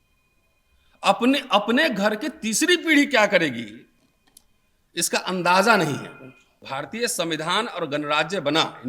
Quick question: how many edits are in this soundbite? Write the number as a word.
one